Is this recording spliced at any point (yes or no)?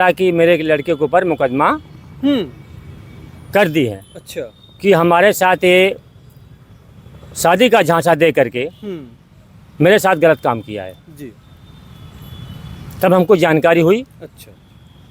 no